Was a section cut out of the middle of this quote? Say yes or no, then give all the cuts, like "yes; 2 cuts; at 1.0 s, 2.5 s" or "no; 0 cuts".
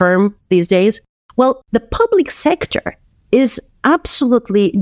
yes; 1 cut; at 1.6 s